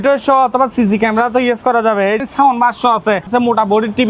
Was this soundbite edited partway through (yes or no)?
yes